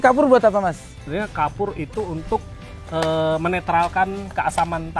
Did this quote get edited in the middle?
yes; 1 cut; at 1.0 s

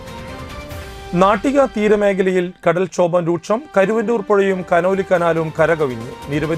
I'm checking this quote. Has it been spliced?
yes; 1 cut; at 0.9 s

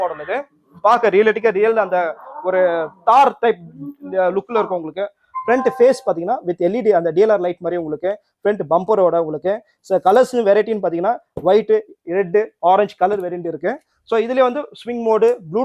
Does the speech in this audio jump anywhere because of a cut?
no; 0 cuts

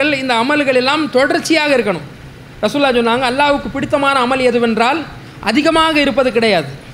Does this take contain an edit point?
no; 0 cuts

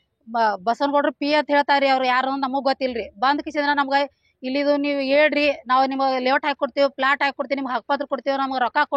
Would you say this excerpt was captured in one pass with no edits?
yes; 0 cuts

